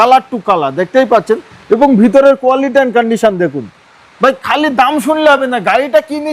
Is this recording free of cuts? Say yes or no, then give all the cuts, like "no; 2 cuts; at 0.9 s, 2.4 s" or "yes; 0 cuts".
yes; 0 cuts